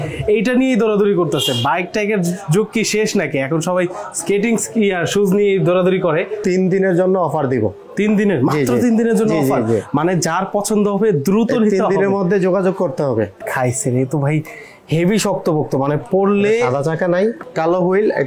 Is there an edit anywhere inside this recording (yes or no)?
yes